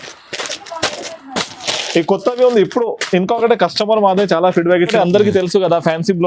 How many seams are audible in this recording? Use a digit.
1